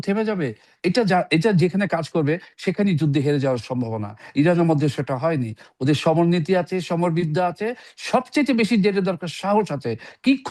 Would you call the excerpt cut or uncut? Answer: uncut